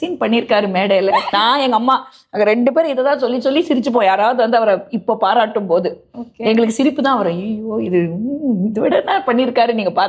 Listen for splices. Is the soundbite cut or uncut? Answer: cut